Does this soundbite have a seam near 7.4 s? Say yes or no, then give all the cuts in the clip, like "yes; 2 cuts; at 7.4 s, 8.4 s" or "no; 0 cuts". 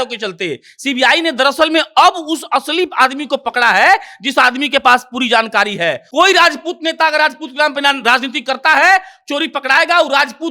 no; 1 cut; at 6.0 s